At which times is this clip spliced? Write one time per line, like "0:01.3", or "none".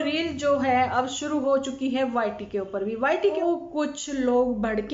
0:03.4